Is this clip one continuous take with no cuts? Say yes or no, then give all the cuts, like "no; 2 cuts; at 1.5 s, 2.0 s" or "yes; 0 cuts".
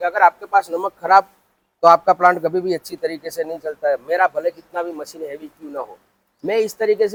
yes; 0 cuts